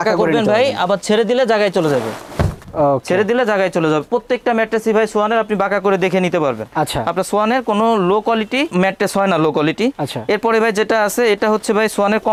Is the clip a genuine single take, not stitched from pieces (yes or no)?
yes